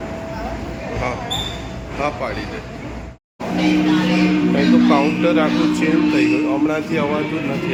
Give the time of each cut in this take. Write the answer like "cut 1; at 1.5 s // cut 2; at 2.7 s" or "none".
none